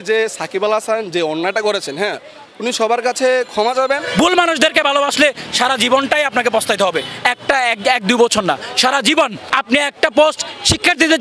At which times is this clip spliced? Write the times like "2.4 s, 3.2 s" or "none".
4.1 s, 9.4 s